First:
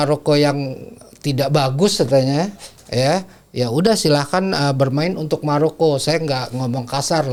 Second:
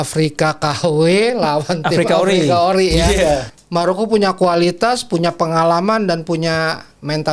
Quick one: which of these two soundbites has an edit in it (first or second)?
second